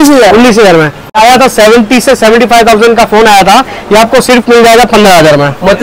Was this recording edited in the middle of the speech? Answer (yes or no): yes